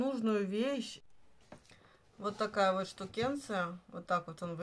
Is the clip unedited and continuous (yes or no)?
no